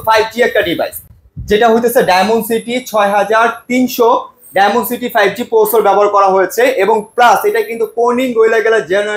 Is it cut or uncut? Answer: uncut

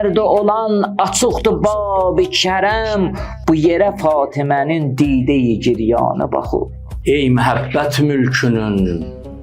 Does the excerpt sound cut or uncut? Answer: cut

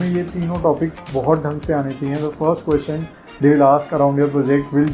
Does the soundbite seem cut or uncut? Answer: uncut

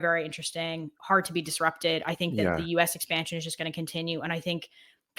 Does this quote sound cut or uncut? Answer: cut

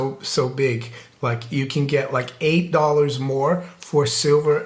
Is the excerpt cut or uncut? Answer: uncut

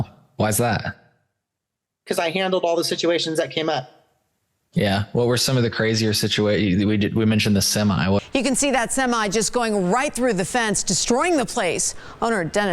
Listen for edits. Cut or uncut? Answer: cut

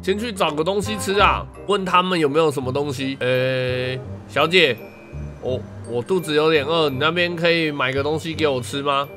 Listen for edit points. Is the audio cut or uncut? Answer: cut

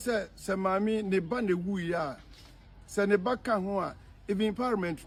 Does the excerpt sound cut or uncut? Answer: uncut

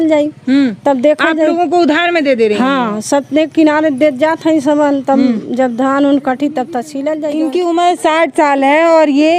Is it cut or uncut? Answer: cut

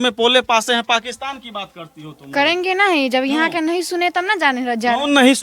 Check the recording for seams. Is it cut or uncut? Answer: uncut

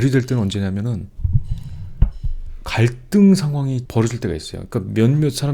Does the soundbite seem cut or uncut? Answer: uncut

